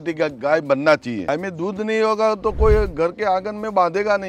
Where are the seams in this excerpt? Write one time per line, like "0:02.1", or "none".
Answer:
0:01.3